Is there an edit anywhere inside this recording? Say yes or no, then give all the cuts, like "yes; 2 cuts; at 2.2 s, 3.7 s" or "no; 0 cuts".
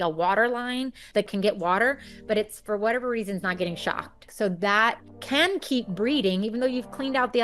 yes; 2 cuts; at 4.2 s, 5.1 s